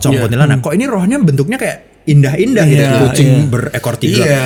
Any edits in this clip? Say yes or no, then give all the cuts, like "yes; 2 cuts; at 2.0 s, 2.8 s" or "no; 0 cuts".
no; 0 cuts